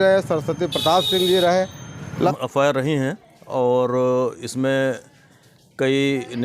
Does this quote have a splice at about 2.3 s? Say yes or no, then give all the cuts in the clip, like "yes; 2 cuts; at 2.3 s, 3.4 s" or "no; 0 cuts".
yes; 1 cut; at 2.3 s